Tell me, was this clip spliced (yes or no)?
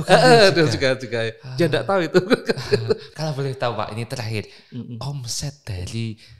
yes